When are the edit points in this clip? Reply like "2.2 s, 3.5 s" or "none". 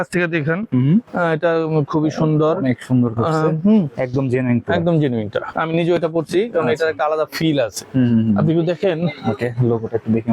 5.5 s